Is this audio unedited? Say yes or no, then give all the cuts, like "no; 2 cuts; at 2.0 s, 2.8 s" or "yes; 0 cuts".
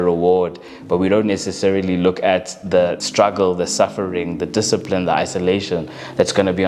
no; 1 cut; at 3.0 s